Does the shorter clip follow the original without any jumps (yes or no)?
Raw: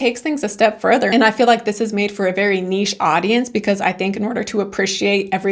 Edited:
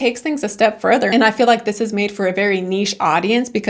yes